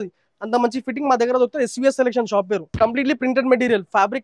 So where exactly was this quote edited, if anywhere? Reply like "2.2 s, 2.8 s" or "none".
2.8 s